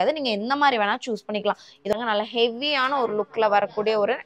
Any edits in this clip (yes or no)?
yes